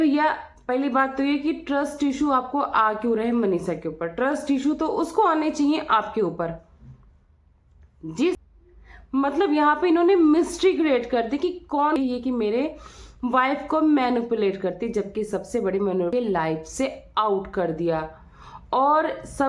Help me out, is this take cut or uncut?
cut